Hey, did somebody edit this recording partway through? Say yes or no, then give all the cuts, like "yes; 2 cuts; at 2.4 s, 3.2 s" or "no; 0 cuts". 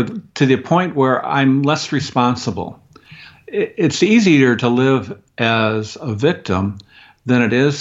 no; 0 cuts